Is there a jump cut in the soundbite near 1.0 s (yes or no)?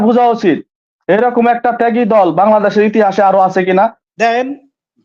no